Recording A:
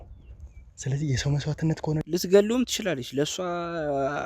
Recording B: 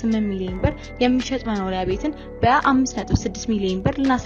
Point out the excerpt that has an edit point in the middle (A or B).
A